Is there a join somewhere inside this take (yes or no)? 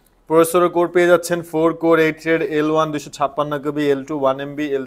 no